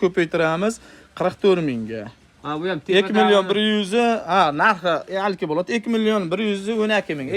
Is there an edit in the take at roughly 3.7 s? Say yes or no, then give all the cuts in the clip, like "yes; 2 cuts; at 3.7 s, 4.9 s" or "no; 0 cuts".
no; 0 cuts